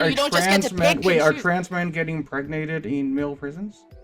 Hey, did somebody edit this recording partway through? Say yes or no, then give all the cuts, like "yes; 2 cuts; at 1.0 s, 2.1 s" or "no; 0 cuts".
no; 0 cuts